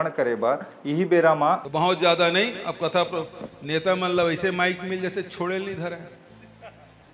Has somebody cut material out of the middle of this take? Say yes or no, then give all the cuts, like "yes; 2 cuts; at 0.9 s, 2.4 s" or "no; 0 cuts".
yes; 1 cut; at 1.7 s